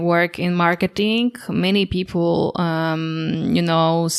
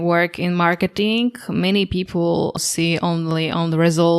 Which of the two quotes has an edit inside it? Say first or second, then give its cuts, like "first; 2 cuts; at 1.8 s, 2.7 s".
second; 1 cut; at 2.6 s